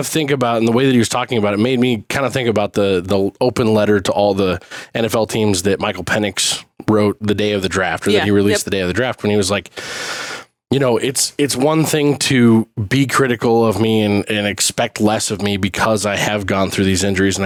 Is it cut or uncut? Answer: uncut